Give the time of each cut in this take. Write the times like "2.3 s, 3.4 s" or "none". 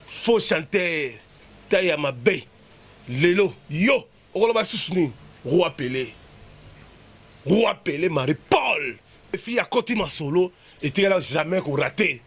9.4 s